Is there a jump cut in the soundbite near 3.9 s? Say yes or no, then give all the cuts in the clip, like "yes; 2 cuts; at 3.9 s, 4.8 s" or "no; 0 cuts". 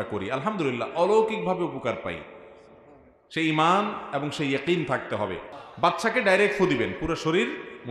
no; 1 cut; at 5.9 s